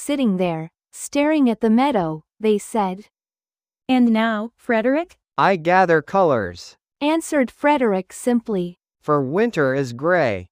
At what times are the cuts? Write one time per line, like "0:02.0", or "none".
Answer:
0:05.3
0:08.8